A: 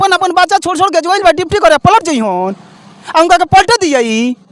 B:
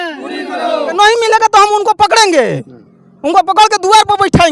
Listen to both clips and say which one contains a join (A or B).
B